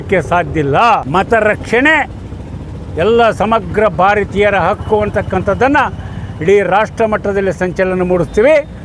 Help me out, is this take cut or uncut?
cut